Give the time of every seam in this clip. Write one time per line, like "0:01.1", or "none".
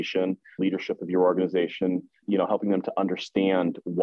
none